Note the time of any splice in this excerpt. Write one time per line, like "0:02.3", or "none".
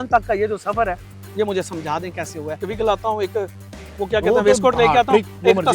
0:02.7